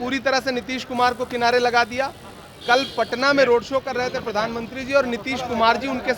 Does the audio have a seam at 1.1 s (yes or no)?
no